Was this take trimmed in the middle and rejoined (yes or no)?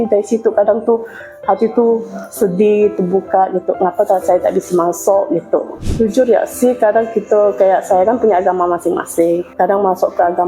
yes